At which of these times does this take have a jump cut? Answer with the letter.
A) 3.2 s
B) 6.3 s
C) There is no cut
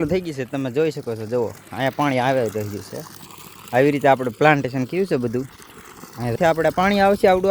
B